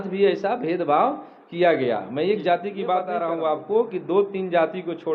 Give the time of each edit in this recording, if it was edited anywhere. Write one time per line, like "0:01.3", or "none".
0:03.1